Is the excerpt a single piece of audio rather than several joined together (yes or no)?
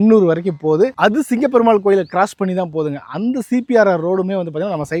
yes